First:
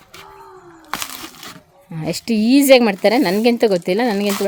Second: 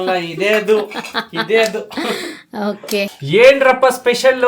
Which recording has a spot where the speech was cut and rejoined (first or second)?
second